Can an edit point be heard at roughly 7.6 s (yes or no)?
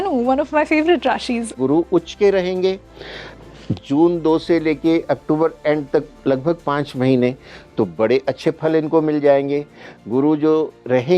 no